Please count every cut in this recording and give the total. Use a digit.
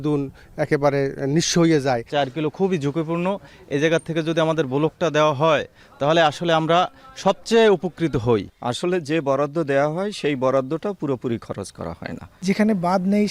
3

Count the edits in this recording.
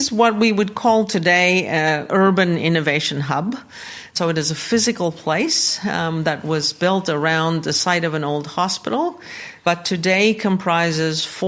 0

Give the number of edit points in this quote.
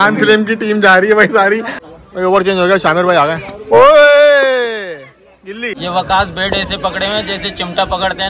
2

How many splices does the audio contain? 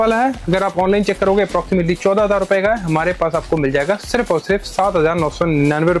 0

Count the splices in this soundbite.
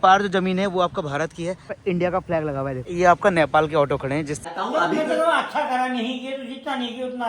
3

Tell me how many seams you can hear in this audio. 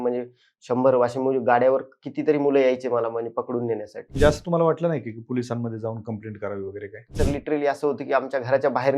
2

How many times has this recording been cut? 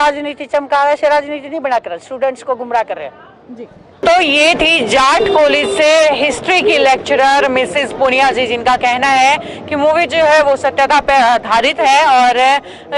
0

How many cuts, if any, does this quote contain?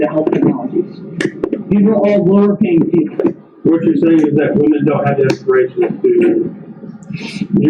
1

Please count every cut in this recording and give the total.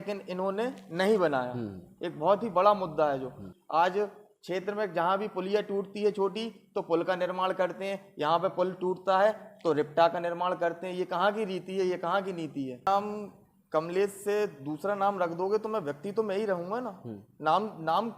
2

